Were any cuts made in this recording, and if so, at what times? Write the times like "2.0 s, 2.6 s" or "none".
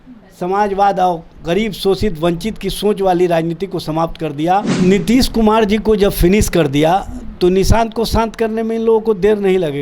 4.7 s